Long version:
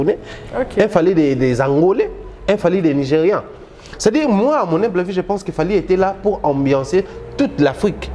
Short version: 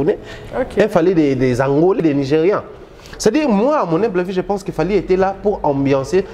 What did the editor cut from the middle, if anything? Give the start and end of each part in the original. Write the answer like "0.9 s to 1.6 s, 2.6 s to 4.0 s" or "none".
2.0 s to 2.8 s